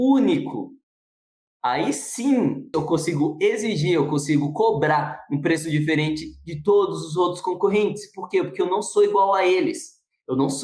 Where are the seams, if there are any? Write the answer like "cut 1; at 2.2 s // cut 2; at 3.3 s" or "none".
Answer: cut 1; at 2.7 s